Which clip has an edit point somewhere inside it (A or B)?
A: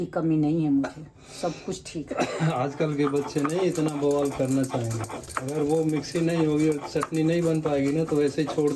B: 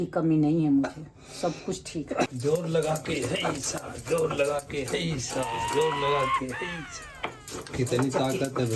B